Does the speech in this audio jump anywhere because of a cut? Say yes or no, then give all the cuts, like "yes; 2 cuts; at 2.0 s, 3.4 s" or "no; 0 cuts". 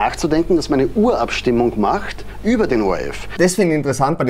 yes; 1 cut; at 3.3 s